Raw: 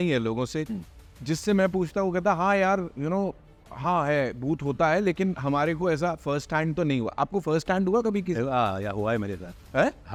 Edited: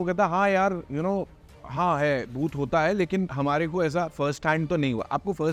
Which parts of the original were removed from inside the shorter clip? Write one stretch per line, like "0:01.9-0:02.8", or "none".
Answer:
none